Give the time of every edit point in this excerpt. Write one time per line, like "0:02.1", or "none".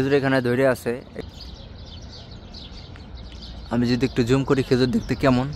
0:01.1